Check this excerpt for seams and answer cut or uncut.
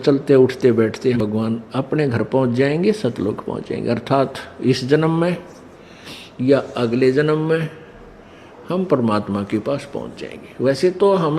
cut